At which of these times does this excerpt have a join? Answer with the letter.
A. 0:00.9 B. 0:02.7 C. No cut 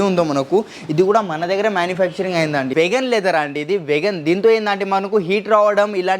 B